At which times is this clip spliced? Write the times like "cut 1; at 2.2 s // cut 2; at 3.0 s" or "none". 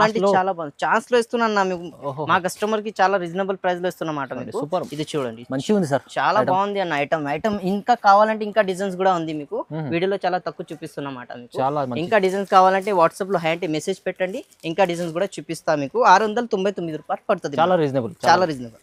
none